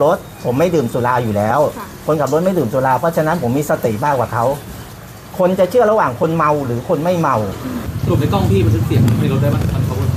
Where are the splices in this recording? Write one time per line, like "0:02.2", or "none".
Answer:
none